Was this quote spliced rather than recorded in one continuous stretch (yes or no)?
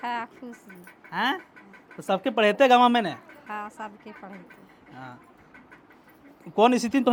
no